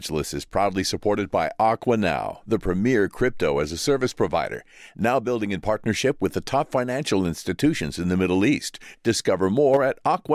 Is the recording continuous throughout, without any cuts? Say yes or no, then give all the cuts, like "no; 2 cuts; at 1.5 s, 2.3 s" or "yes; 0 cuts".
yes; 0 cuts